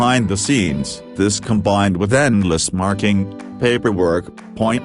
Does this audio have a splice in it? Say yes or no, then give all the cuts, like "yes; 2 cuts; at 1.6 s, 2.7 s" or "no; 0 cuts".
no; 0 cuts